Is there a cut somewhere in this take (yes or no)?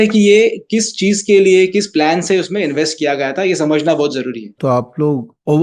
yes